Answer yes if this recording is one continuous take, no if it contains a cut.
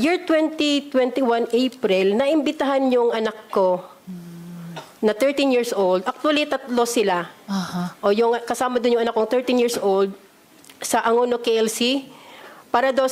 yes